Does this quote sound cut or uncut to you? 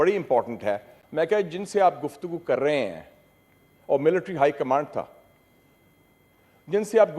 cut